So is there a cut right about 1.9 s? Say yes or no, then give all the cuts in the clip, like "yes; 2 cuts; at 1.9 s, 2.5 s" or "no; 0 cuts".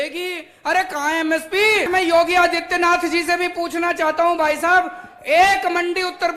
yes; 1 cut; at 1.9 s